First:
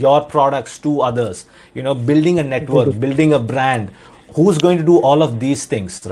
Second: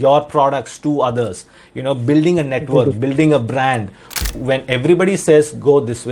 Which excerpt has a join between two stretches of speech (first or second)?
second